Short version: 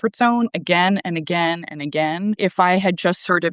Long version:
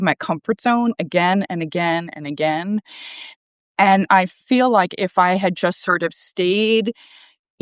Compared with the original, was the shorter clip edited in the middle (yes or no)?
yes